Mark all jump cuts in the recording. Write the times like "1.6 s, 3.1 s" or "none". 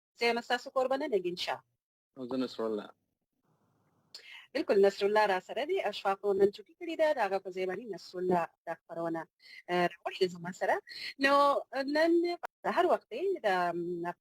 12.5 s